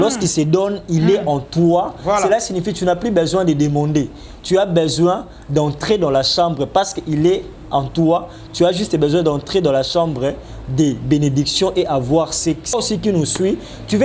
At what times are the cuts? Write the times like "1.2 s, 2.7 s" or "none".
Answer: 12.7 s